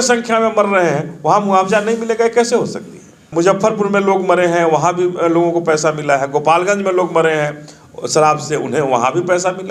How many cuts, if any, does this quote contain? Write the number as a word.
one